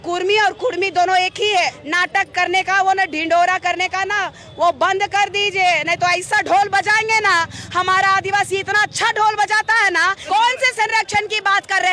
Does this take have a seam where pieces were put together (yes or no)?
yes